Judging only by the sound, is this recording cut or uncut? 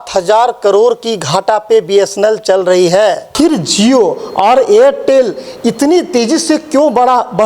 cut